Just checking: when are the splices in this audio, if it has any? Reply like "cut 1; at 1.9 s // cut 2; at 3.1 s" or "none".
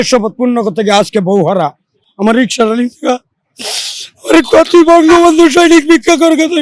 none